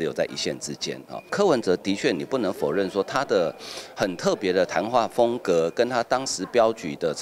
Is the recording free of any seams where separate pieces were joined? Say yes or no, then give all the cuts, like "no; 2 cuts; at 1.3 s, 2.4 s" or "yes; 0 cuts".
no; 1 cut; at 1.3 s